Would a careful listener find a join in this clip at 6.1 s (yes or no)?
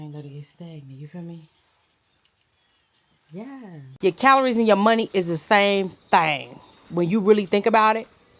no